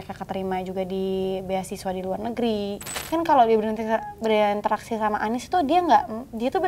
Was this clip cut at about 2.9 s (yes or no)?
yes